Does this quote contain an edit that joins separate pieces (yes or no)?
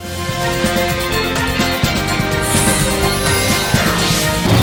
no